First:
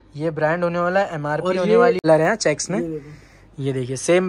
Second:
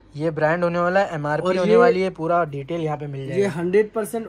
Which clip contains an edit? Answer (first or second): first